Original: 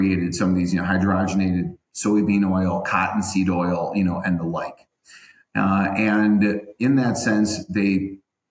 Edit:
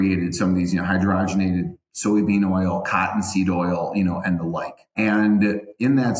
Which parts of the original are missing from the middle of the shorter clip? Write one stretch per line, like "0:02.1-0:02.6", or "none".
0:04.9-0:05.9